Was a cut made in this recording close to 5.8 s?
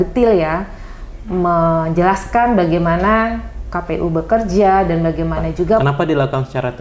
yes; 1 cut; at 5.8 s

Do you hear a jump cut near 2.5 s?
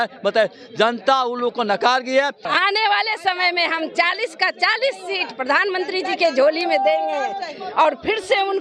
yes; 1 cut; at 2.5 s

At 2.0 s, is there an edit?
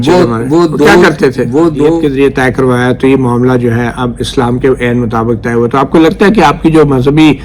yes; 1 cut; at 2.0 s

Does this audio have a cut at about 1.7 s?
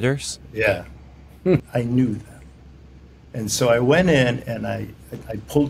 yes; 1 cut; at 1.7 s

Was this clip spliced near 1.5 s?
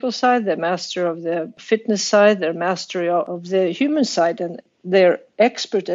yes; 3 cuts; at 1.5 s, 3.3 s, 4.7 s

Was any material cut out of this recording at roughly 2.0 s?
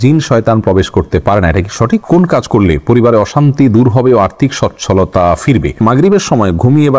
yes; 2 cuts; at 2.0 s, 5.8 s

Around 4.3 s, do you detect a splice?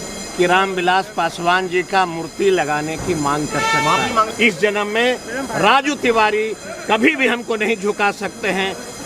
yes; 1 cut; at 4.3 s

